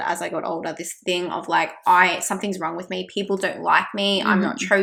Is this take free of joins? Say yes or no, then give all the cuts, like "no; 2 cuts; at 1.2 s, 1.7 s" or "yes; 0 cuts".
yes; 0 cuts